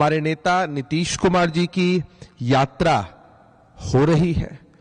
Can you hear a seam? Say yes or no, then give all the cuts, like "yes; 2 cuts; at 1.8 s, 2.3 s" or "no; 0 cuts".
yes; 1 cut; at 1.1 s